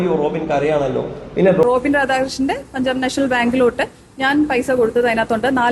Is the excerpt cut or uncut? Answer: cut